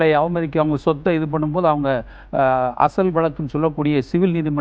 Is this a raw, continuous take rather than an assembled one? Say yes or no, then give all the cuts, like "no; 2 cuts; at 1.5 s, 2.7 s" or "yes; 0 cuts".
yes; 0 cuts